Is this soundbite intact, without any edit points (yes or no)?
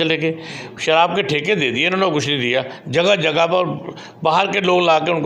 yes